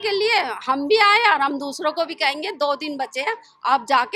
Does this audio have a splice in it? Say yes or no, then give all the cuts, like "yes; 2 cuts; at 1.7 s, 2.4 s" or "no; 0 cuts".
no; 0 cuts